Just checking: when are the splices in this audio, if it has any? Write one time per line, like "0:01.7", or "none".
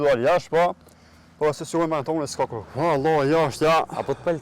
0:02.6

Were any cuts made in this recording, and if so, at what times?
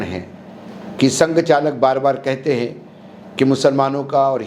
none

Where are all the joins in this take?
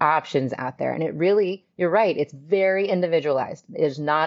none

